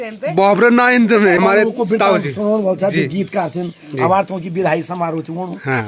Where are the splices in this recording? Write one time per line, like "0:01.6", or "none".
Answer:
0:01.4